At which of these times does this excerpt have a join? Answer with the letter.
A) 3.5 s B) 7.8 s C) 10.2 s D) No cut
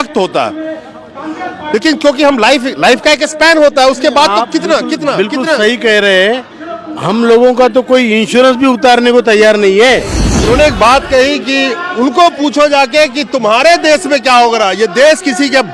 C